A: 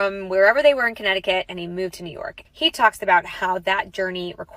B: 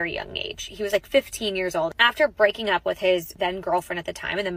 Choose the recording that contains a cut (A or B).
B